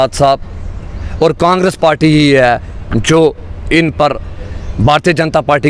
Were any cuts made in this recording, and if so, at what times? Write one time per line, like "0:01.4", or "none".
none